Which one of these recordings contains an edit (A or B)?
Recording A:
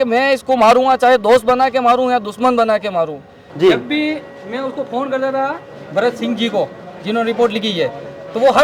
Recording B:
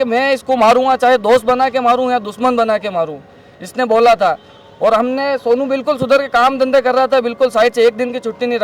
A